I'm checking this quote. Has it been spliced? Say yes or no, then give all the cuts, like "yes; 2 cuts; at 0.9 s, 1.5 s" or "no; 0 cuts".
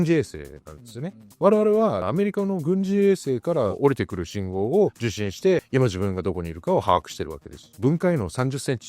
yes; 4 cuts; at 1.2 s, 2.0 s, 5.7 s, 7.7 s